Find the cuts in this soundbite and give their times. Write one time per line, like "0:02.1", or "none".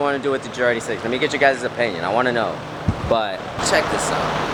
none